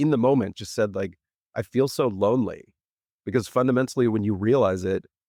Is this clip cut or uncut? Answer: uncut